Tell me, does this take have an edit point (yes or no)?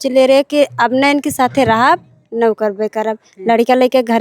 no